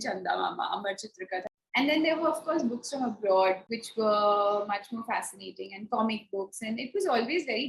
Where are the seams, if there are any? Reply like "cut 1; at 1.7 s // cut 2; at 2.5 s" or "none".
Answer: cut 1; at 1.4 s // cut 2; at 3.8 s